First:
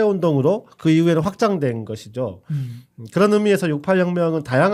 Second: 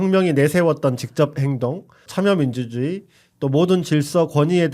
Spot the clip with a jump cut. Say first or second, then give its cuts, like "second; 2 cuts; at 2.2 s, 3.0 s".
second; 1 cut; at 1.9 s